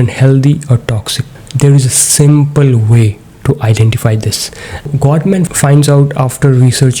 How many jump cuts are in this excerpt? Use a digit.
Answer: 2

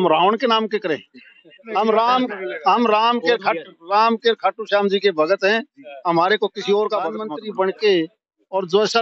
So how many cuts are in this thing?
2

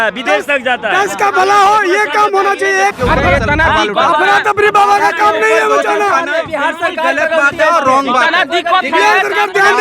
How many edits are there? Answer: 1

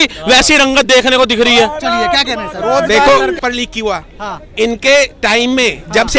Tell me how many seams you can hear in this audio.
1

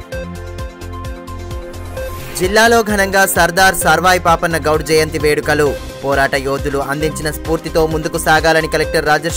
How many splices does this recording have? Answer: 1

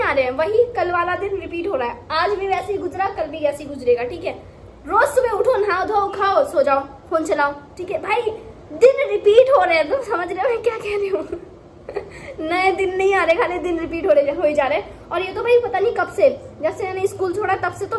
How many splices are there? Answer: 0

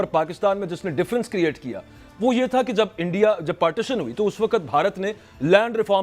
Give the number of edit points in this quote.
0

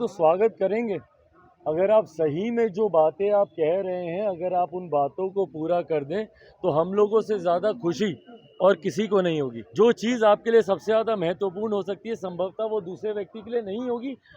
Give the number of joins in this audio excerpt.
1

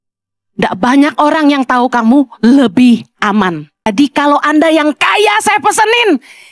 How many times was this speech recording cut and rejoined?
1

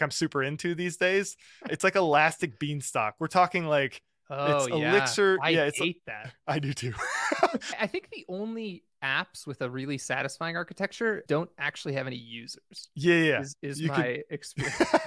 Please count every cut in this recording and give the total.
1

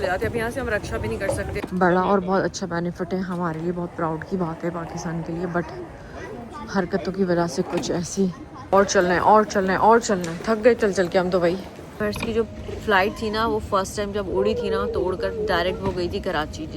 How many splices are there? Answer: 3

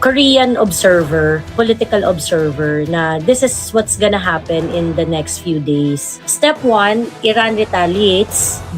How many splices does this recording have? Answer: 1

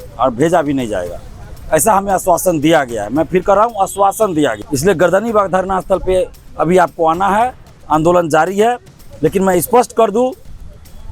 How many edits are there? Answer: 1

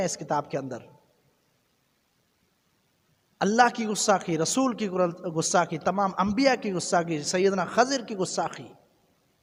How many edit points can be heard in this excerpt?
0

